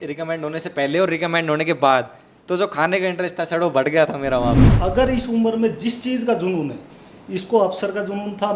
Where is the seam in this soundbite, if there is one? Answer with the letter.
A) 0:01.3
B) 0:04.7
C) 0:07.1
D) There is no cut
B